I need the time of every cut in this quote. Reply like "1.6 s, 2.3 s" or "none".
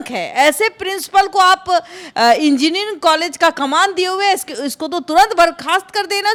none